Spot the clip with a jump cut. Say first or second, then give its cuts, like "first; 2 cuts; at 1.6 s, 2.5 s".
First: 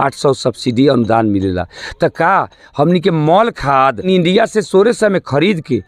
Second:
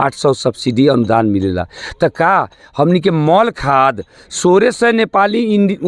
first; 1 cut; at 4.1 s